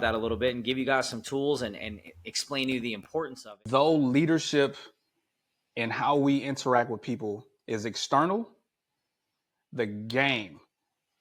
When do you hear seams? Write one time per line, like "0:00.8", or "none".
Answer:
0:03.4